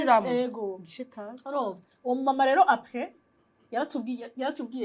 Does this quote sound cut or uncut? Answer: uncut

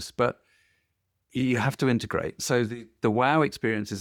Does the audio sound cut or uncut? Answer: uncut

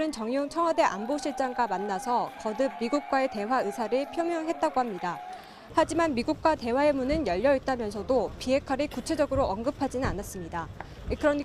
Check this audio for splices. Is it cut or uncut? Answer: uncut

